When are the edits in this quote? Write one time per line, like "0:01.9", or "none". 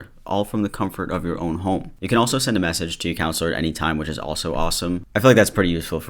0:01.9